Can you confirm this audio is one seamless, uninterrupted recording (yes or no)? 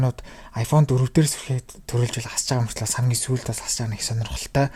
yes